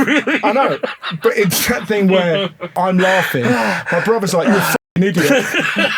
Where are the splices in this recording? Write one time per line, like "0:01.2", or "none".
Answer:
0:02.7